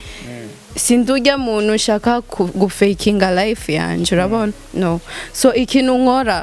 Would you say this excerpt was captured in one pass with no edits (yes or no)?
yes